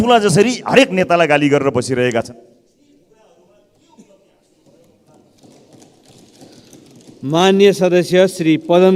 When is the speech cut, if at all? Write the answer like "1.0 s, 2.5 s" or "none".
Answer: none